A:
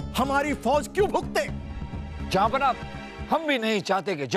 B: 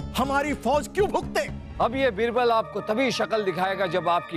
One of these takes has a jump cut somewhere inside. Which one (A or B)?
B